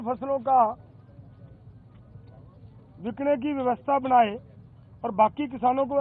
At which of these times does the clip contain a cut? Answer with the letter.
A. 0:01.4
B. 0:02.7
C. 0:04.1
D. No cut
D